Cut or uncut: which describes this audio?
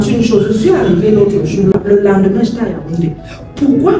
cut